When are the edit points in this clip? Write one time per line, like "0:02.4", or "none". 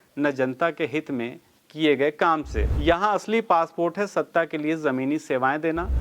0:02.6